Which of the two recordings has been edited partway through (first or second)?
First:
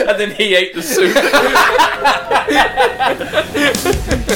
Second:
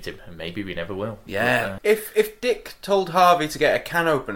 second